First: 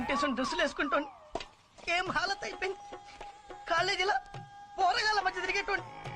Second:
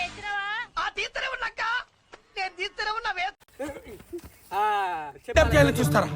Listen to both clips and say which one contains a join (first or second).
second